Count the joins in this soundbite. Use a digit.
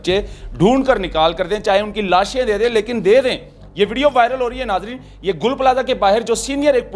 1